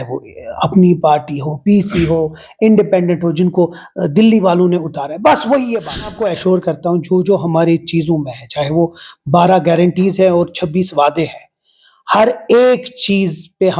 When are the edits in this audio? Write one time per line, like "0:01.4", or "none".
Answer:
0:06.2